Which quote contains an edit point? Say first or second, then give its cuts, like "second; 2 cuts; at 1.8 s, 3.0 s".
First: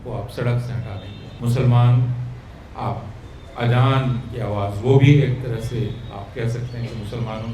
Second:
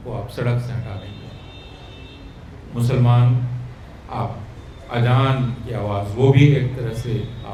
first; 1 cut; at 1.2 s